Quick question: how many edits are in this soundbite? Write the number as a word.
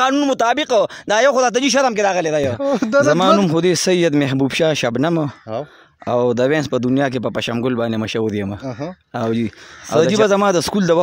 two